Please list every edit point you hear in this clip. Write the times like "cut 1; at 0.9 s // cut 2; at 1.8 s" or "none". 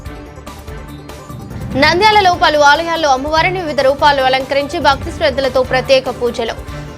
cut 1; at 1.3 s